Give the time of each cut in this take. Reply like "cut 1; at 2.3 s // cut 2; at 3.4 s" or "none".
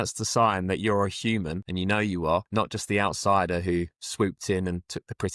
cut 1; at 1.6 s // cut 2; at 2.5 s